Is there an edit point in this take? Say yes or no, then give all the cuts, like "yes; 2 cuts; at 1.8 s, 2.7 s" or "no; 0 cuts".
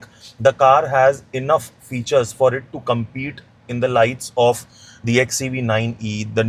no; 0 cuts